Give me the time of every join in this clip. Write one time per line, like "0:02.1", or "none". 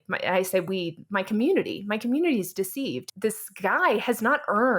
0:03.0